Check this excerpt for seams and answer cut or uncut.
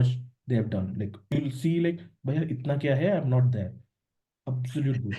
uncut